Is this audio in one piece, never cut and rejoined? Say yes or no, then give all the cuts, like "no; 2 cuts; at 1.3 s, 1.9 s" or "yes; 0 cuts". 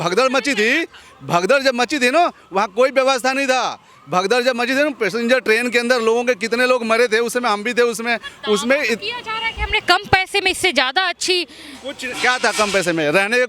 yes; 0 cuts